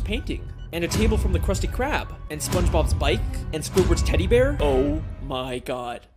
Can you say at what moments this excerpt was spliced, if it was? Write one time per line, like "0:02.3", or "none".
0:04.6

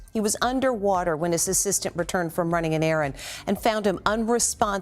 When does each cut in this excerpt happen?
none

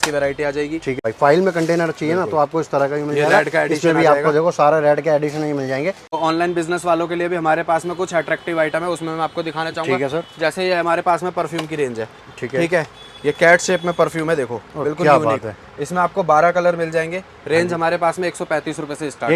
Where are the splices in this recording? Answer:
0:01.0
0:06.1

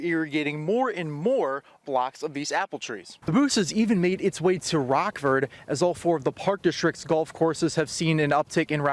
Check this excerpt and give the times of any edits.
0:03.2

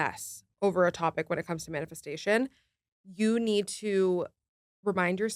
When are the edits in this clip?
none

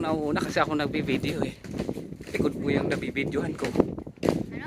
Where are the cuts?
none

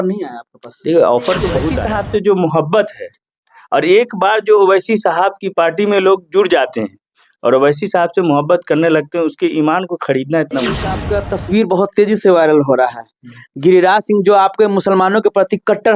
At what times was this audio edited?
0:01.7
0:11.0

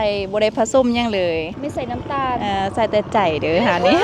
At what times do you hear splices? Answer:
0:01.5

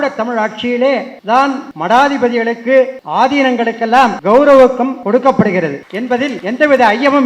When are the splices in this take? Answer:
0:01.2
0:03.0
0:04.2
0:05.0
0:06.1

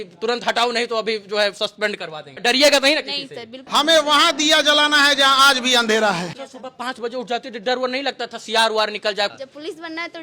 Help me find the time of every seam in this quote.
0:02.4
0:03.6
0:06.2
0:09.3

